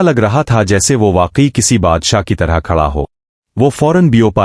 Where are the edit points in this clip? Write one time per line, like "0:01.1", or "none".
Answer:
0:03.2